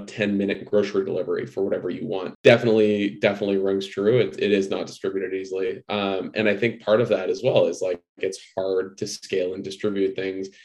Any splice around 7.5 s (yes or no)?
no